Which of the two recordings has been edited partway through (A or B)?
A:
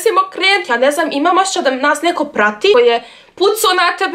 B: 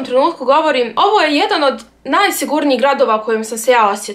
A